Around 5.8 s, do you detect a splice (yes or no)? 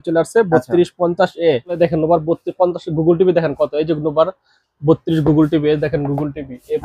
no